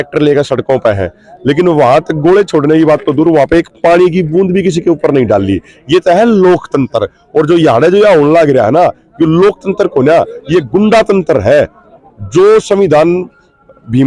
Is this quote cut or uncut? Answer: uncut